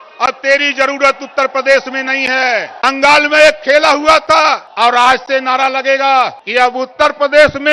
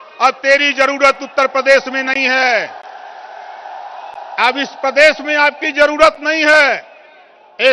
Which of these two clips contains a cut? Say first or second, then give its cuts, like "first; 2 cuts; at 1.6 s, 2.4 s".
first; 3 cuts; at 2.7 s, 4.7 s, 6.4 s